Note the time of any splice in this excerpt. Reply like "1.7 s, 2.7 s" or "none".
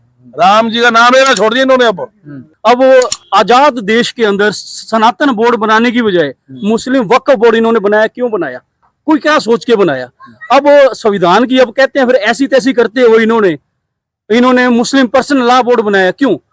2.5 s